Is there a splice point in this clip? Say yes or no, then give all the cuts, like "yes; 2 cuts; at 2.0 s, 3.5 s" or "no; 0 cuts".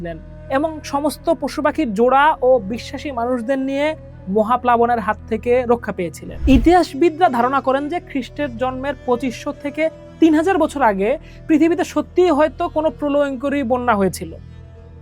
yes; 1 cut; at 6.2 s